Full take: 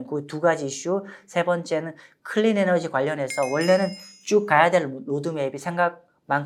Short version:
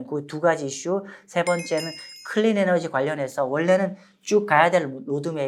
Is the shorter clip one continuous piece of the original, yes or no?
yes